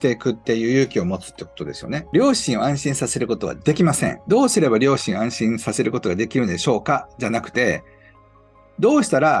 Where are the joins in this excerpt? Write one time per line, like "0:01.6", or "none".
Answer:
0:02.0
0:04.2